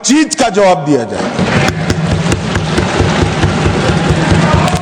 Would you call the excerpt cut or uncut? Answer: uncut